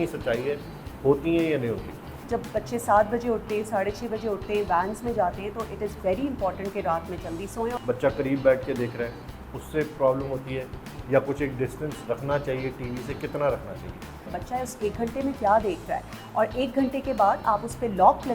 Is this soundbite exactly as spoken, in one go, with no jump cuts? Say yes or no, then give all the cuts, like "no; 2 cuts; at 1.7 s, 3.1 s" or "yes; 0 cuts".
no; 3 cuts; at 2.2 s, 7.8 s, 14.3 s